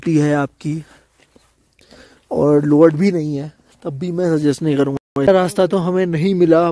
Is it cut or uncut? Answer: cut